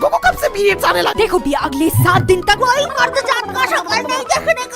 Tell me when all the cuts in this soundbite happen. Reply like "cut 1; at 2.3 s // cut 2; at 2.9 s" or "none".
cut 1; at 1.1 s